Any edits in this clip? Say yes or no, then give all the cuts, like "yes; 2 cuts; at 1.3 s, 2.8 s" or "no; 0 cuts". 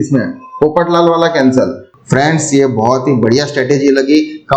yes; 1 cut; at 1.8 s